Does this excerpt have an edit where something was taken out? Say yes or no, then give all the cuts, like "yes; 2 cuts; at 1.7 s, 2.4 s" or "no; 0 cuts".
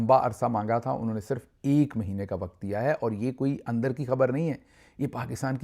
no; 0 cuts